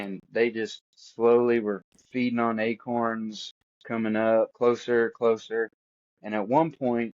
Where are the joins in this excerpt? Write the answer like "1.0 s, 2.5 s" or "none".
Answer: 4.5 s